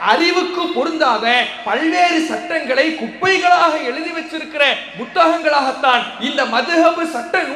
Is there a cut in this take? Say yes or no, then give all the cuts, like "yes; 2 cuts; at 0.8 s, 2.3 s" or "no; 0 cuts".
no; 0 cuts